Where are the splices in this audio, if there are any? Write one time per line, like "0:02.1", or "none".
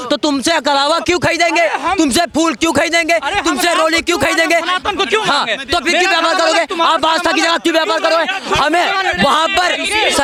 none